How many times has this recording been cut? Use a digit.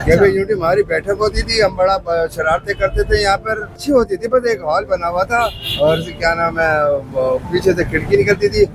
0